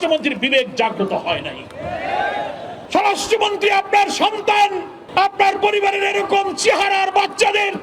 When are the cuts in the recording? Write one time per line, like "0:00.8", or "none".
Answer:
0:02.8